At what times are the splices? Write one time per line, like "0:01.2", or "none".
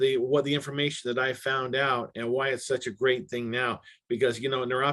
none